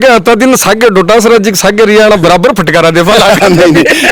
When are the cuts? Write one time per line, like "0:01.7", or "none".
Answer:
none